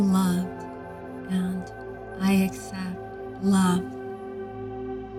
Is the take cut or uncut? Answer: uncut